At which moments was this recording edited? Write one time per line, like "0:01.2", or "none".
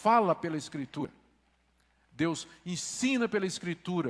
0:01.0